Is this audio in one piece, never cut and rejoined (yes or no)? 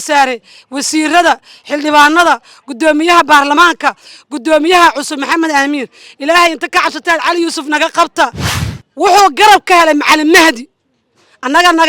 no